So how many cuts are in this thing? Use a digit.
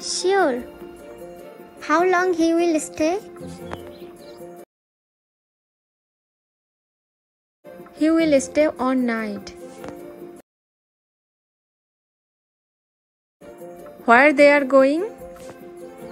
0